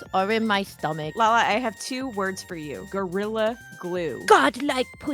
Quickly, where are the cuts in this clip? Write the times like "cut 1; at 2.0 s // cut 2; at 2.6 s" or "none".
cut 1; at 1.1 s // cut 2; at 2.8 s // cut 3; at 4.2 s